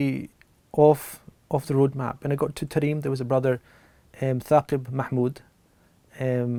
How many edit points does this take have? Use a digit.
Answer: 0